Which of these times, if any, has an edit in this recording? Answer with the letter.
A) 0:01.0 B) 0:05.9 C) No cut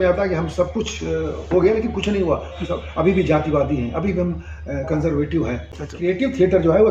B